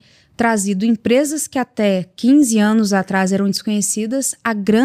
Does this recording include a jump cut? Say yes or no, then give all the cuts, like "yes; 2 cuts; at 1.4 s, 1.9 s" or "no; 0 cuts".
no; 0 cuts